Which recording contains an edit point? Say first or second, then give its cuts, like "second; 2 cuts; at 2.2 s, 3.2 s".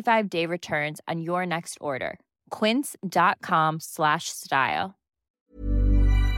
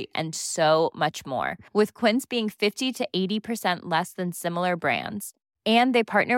first; 1 cut; at 5.3 s